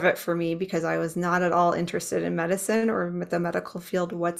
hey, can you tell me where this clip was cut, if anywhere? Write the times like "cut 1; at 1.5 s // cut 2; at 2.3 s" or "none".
none